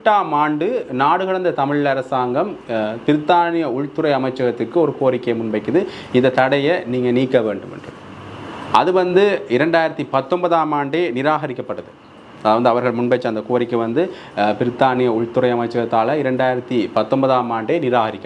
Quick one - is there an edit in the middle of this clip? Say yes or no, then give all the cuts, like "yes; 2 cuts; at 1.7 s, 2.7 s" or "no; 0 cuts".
no; 0 cuts